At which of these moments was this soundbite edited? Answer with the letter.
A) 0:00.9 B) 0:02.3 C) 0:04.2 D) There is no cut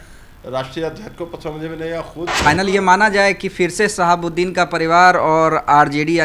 B